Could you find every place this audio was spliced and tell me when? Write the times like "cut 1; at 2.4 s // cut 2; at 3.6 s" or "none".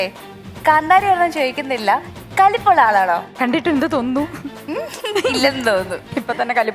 cut 1; at 3.4 s // cut 2; at 4.6 s